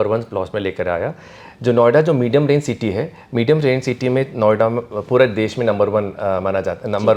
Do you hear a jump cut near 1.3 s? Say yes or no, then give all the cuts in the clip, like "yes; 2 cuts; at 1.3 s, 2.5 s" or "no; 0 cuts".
no; 0 cuts